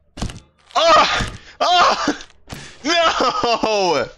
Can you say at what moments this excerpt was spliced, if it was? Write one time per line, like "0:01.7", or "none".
none